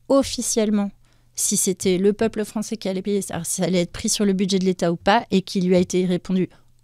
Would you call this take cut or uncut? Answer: uncut